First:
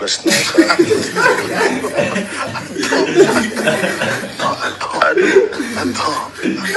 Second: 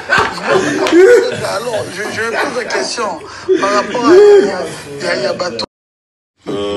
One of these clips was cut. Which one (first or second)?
second